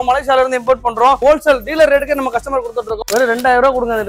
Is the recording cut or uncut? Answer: cut